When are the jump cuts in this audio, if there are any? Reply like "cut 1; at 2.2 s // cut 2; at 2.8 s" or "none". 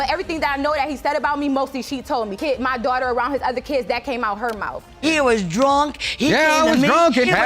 cut 1; at 4.7 s